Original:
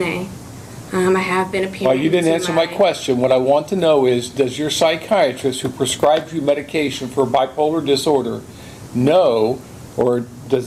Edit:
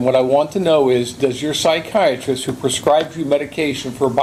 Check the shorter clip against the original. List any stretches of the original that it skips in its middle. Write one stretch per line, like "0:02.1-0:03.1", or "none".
none